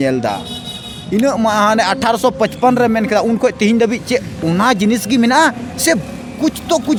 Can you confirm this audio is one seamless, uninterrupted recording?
yes; 0 cuts

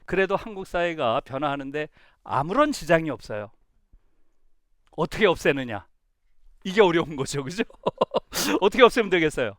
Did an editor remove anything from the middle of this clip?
yes; 1 cut; at 8.5 s

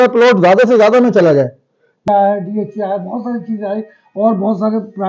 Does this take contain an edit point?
yes; 1 cut; at 2.0 s

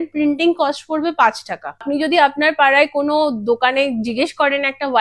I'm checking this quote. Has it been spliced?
yes; 1 cut; at 1.8 s

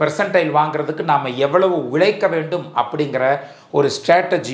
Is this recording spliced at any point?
no; 0 cuts

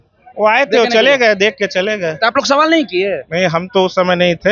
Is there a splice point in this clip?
no; 0 cuts

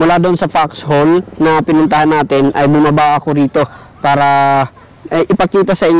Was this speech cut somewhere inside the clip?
no; 0 cuts

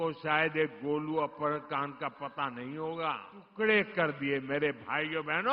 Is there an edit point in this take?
yes; 1 cut; at 3.4 s

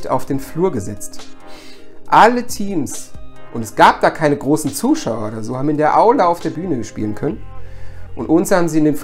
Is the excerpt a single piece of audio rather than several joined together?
yes; 0 cuts

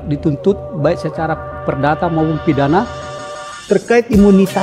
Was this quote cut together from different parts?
yes; 1 cut; at 3.1 s

